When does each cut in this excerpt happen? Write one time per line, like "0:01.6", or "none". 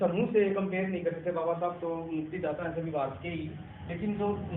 none